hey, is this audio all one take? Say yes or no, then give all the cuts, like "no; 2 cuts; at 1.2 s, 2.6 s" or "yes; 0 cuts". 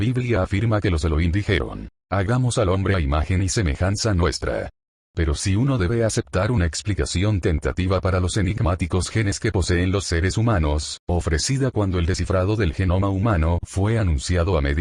yes; 0 cuts